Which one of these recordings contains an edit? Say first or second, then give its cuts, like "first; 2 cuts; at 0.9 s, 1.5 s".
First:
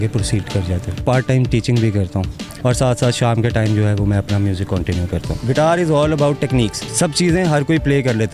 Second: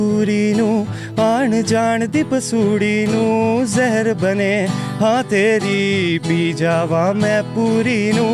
first; 4 cuts; at 1.0 s, 2.5 s, 5.4 s, 6.8 s